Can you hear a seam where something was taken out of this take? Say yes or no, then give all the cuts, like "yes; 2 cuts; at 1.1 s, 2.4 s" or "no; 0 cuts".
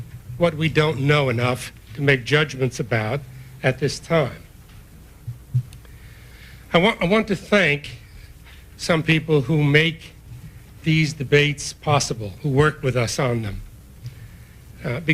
yes; 1 cut; at 13.8 s